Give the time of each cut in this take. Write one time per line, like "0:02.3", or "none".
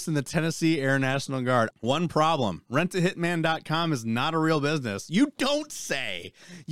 0:01.7